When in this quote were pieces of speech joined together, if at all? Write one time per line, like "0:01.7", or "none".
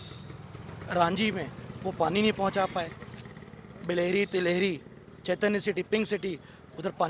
none